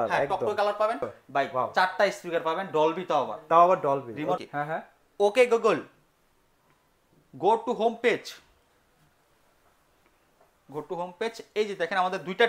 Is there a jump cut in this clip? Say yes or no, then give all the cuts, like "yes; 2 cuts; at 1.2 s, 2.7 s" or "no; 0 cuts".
yes; 2 cuts; at 1.2 s, 4.4 s